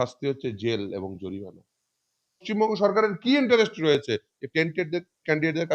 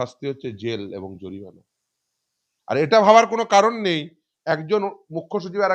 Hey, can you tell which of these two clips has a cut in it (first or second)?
first